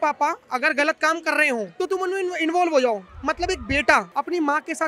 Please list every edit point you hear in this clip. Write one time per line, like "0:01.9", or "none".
0:01.7
0:04.1